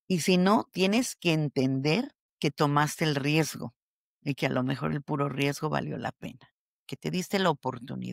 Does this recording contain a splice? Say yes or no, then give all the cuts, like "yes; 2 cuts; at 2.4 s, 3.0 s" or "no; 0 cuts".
yes; 1 cut; at 2.2 s